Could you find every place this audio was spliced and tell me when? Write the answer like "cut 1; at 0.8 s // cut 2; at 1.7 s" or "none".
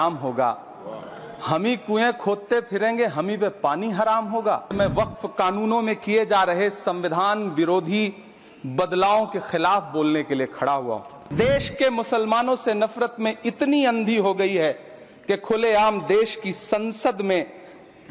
cut 1; at 4.7 s // cut 2; at 11.1 s